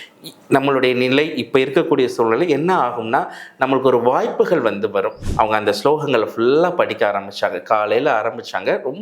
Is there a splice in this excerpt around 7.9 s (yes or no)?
no